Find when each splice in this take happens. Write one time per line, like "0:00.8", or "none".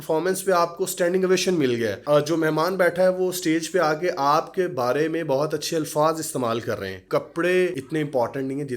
0:02.0
0:07.0
0:07.8